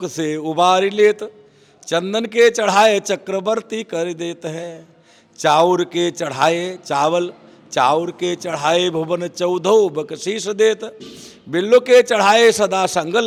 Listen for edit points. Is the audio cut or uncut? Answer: uncut